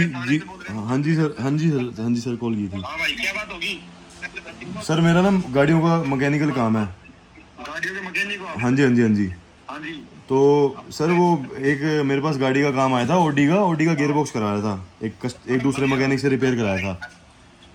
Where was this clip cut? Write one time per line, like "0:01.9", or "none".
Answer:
none